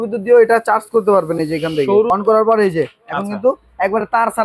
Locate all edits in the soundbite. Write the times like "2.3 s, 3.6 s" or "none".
2.1 s